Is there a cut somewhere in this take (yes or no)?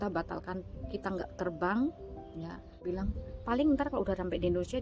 yes